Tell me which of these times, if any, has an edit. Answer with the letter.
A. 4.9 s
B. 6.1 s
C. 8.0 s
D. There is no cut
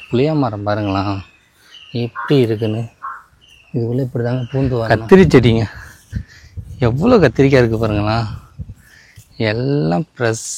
A